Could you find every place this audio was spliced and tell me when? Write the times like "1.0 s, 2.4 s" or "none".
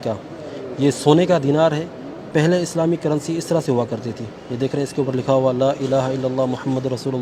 none